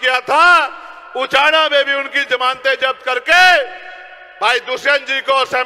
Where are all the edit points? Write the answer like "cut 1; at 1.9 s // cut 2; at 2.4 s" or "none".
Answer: none

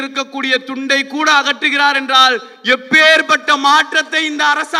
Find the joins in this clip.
none

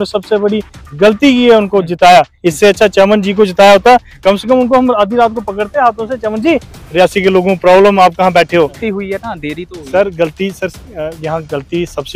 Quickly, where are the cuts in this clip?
cut 1; at 8.8 s

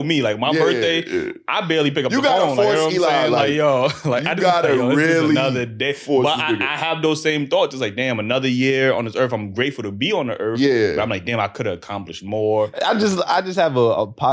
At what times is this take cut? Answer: cut 1; at 12.7 s

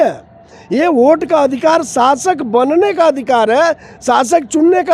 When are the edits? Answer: none

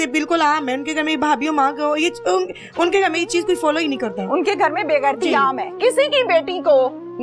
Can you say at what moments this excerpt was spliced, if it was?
cut 1; at 5.8 s

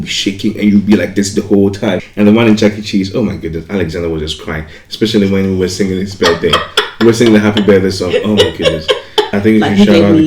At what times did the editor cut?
cut 1; at 2.1 s // cut 2; at 9.3 s

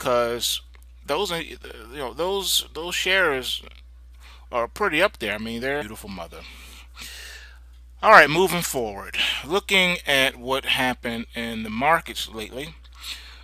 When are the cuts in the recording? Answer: none

